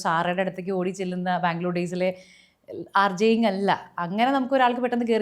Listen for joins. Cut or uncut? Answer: cut